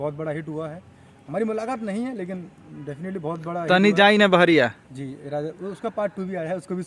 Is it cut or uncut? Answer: uncut